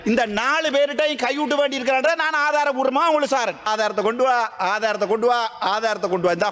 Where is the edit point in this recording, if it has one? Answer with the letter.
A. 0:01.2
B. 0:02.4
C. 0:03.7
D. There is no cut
C